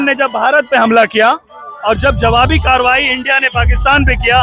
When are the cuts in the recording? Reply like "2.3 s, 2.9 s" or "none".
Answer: none